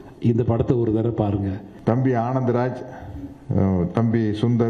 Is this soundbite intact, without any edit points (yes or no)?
no